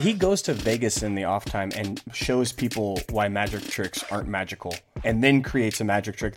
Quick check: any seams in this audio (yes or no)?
no